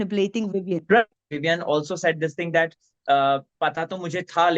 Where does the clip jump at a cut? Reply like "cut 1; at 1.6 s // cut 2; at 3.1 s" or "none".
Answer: cut 1; at 1.2 s